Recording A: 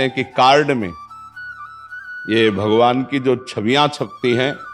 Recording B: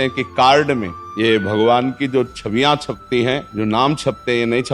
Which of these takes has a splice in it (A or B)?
B